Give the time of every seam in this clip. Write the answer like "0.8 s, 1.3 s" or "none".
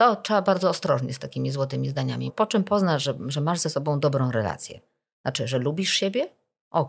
2.3 s